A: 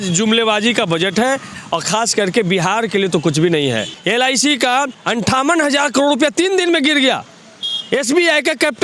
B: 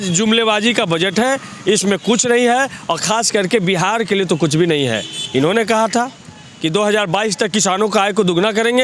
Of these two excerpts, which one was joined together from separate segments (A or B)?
A